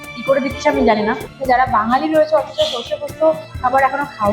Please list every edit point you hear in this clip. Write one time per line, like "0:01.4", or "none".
0:01.2